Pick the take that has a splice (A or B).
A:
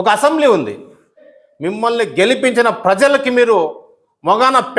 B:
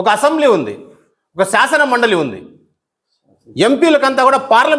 A